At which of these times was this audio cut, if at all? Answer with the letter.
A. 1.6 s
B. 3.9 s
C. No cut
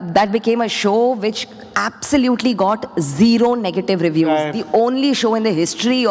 C